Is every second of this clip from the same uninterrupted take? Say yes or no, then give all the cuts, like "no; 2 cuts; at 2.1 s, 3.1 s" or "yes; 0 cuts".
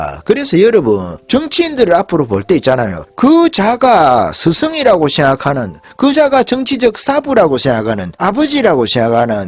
no; 3 cuts; at 1.1 s, 3.0 s, 8.1 s